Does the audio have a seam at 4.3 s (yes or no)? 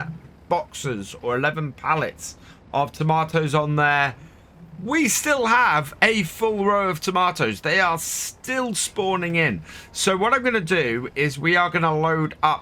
no